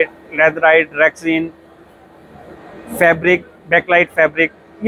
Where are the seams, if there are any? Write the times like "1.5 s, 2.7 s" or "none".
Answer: none